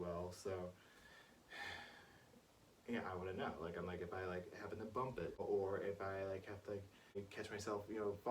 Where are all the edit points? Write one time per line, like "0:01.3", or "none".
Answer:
0:05.4
0:07.3